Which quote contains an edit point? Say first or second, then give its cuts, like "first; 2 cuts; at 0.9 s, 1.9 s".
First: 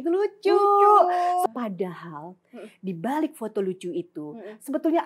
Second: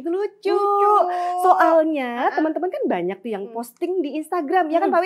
first; 1 cut; at 1.4 s